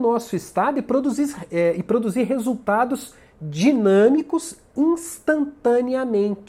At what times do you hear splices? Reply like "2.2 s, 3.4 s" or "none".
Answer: none